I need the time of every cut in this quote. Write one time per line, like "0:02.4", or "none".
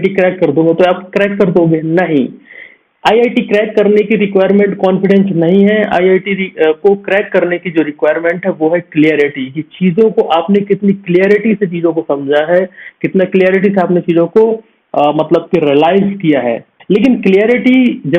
none